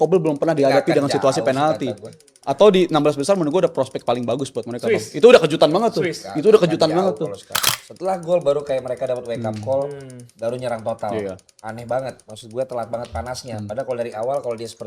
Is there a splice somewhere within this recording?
yes; 1 cut; at 7.7 s

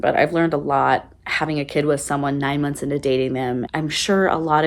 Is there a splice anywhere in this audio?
yes; 1 cut; at 3.6 s

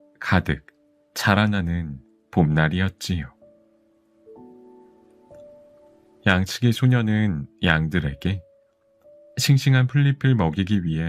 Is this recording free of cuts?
no; 2 cuts; at 3.4 s, 6.2 s

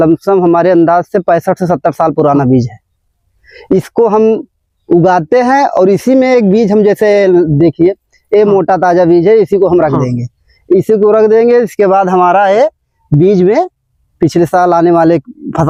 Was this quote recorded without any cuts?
yes; 0 cuts

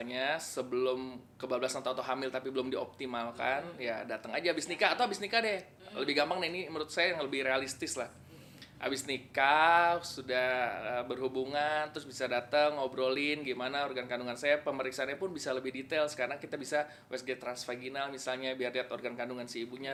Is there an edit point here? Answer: no; 0 cuts

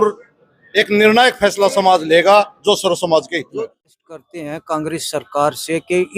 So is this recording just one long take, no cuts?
no; 1 cut; at 3.7 s

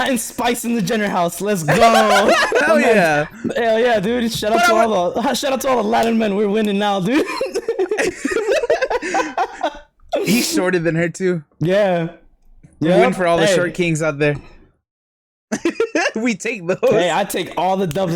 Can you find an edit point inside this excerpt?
yes; 1 cut; at 2.6 s

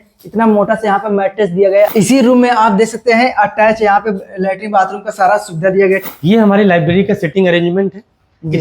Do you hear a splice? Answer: yes; 2 cuts; at 1.9 s, 6.1 s

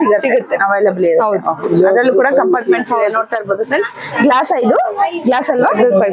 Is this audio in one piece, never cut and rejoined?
yes; 0 cuts

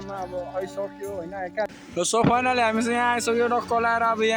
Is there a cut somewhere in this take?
yes; 1 cut; at 1.7 s

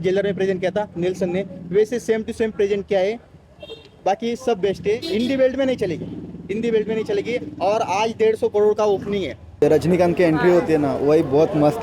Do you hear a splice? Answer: yes; 1 cut; at 9.6 s

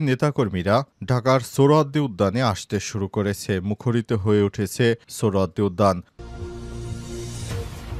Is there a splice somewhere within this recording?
yes; 1 cut; at 6.1 s

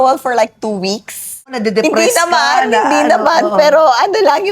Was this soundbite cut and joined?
yes; 1 cut; at 1.6 s

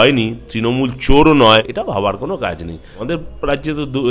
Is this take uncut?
no; 2 cuts; at 1.8 s, 3.0 s

